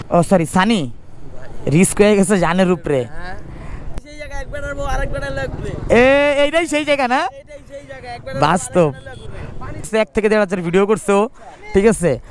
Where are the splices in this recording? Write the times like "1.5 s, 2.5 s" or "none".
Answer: 4.0 s, 9.9 s